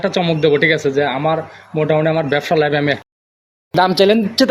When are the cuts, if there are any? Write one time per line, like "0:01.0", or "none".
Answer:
0:03.5